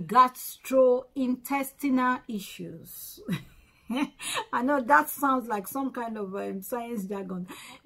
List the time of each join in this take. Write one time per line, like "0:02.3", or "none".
none